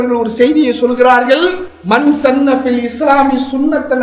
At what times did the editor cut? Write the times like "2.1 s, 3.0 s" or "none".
none